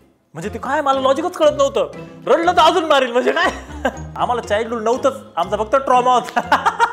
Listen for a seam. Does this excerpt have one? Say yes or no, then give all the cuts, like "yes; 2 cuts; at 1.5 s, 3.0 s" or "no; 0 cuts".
yes; 1 cut; at 4.1 s